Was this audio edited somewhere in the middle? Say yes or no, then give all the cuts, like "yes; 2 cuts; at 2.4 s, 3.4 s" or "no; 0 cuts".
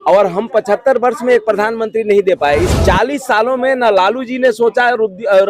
yes; 1 cut; at 2.7 s